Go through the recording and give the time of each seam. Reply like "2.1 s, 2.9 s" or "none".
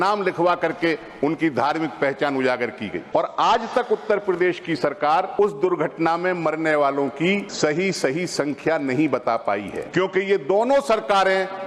3.0 s, 5.4 s, 7.4 s, 9.8 s